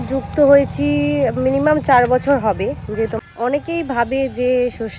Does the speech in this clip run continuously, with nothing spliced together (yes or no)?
no